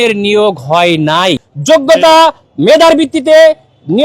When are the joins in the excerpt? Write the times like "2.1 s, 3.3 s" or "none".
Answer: 1.4 s